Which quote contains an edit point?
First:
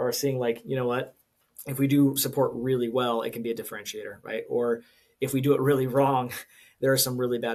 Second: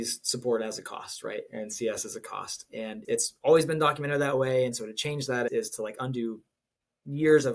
second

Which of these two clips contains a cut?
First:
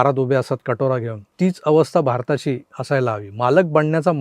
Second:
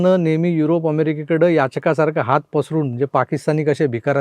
first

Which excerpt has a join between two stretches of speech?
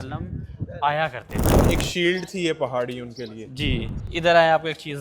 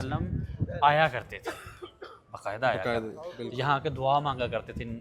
first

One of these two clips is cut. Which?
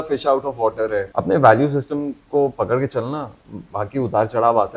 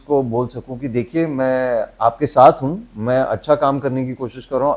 first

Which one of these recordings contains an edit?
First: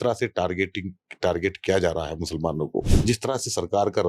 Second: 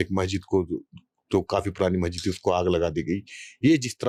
first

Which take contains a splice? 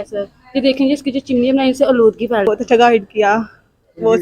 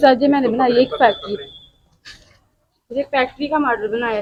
first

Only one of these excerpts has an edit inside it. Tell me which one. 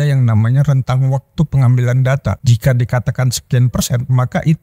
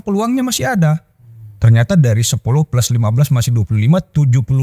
first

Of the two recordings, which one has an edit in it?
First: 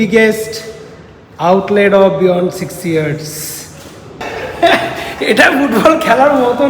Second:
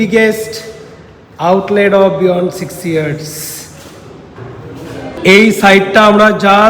first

